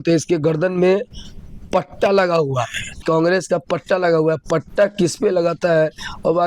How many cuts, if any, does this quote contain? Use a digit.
1